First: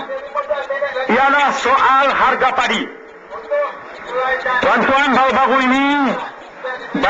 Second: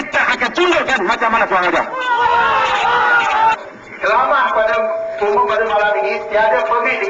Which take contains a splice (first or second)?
second